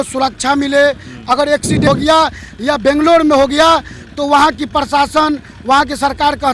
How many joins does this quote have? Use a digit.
1